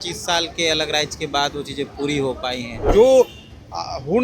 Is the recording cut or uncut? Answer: cut